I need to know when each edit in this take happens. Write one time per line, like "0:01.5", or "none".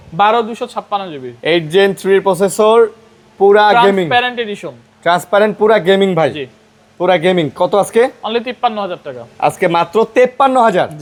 none